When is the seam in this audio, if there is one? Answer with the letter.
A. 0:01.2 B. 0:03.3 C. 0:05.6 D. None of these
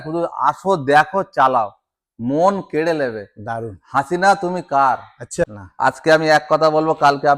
C